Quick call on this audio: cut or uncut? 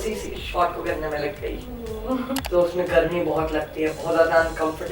cut